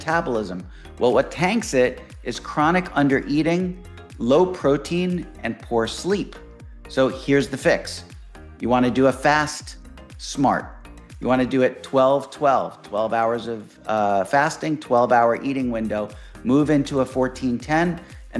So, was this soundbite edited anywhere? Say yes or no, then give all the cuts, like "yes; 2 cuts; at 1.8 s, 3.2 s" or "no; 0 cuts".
no; 0 cuts